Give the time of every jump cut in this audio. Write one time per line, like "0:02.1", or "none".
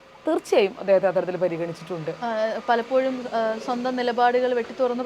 none